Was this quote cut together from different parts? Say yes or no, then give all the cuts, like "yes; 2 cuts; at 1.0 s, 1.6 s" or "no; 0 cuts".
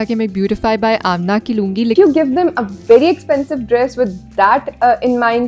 yes; 1 cut; at 1.9 s